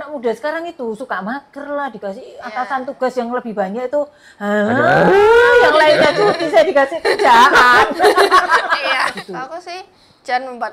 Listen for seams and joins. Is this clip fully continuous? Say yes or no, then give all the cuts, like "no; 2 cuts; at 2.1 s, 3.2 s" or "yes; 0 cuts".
no; 1 cut; at 9.1 s